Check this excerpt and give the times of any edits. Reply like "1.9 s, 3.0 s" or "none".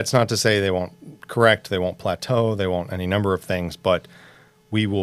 none